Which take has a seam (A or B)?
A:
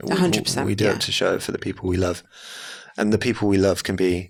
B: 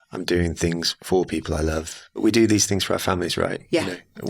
B